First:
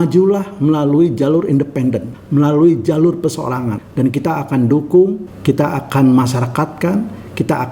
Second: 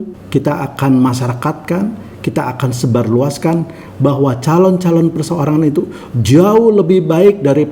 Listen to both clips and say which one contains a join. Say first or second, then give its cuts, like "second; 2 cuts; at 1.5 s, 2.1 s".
first; 2 cuts; at 2.1 s, 3.8 s